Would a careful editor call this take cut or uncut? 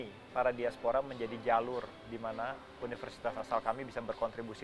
uncut